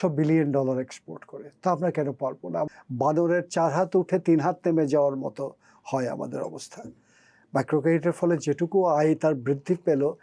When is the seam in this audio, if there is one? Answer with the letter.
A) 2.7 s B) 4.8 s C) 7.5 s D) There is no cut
A